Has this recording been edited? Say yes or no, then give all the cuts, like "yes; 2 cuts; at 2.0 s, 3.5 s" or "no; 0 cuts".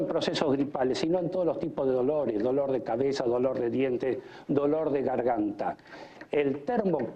no; 0 cuts